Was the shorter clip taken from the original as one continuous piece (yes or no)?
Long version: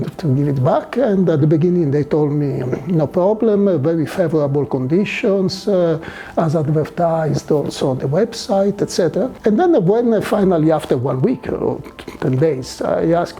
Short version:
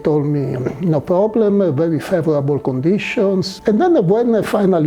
no